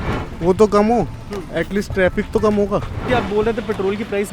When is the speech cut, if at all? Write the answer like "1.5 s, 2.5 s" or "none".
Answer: 3.0 s